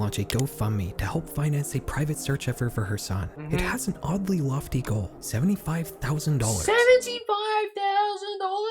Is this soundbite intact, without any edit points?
no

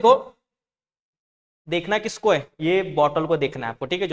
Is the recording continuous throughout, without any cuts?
yes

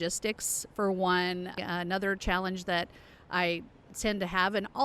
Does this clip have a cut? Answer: yes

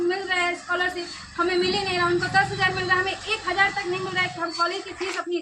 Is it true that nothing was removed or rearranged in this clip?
yes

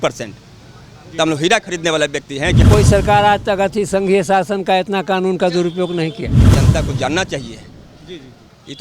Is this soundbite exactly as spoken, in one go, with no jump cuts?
no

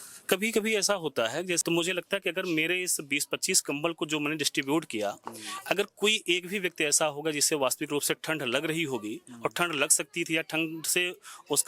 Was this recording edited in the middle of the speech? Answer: yes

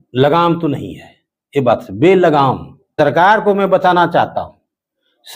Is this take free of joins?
no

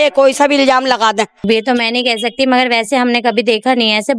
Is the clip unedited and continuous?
no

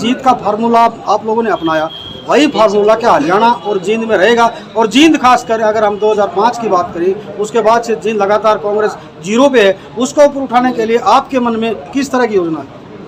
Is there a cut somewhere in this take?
no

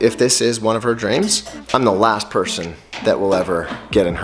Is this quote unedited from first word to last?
no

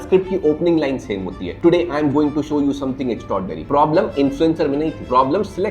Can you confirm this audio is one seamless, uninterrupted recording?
no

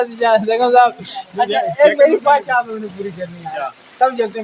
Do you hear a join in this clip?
no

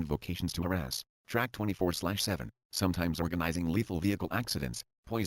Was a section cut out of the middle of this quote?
yes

